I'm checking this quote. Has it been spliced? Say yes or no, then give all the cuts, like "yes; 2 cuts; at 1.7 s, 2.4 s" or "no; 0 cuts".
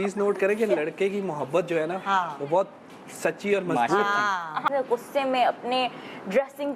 yes; 1 cut; at 4.7 s